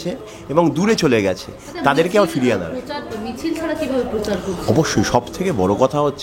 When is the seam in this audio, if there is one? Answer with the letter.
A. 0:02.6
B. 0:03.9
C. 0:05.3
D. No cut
D